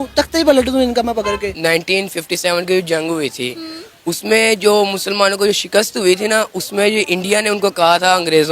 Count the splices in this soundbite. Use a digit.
1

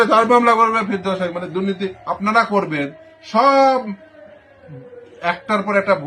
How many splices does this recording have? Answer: 0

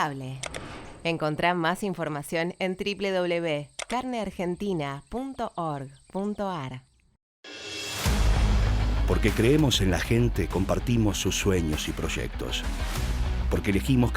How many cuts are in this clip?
1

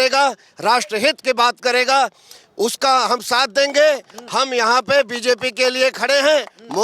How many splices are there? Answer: 0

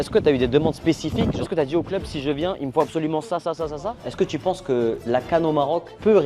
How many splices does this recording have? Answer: 2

